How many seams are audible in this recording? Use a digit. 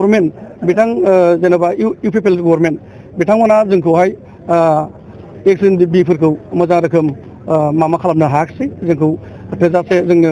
0